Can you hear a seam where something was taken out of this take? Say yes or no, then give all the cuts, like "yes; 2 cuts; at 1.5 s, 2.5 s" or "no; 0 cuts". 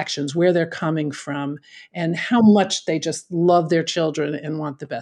no; 0 cuts